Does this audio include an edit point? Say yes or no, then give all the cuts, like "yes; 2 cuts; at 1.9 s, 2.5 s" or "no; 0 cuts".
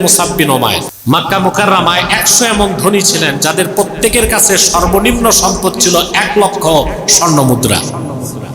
yes; 1 cut; at 0.9 s